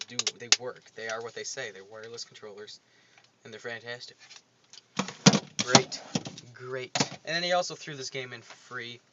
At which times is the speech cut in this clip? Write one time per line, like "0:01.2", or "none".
0:04.0

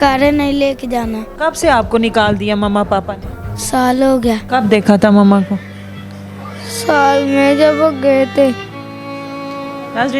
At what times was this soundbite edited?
0:01.2
0:04.4

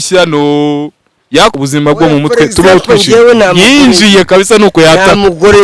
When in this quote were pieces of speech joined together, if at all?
0:01.6

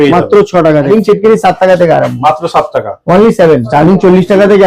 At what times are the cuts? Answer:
0:00.9
0:03.7

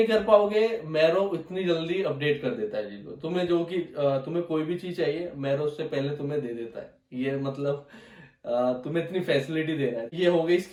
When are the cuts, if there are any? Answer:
none

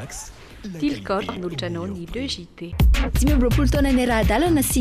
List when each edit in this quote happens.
0:02.6

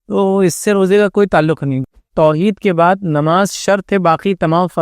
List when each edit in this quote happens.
0:02.0

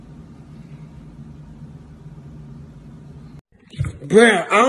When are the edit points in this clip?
0:03.5

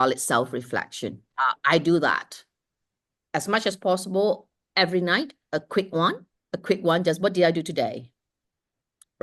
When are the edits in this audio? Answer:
0:01.3

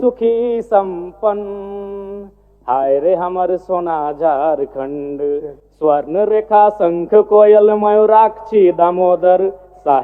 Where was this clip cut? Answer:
none

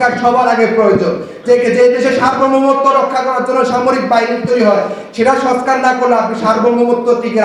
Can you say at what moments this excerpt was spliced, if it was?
none

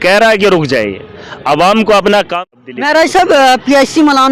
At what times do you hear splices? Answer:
0:02.4

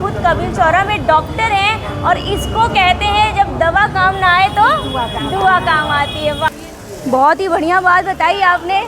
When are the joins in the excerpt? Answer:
0:06.5

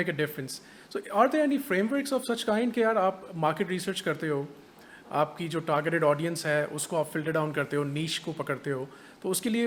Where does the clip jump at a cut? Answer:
none

